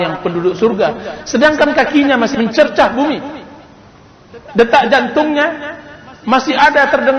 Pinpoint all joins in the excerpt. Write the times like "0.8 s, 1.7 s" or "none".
2.3 s